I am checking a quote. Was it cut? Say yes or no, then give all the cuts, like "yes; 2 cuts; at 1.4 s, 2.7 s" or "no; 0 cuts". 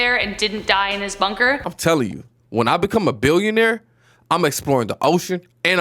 yes; 1 cut; at 1.7 s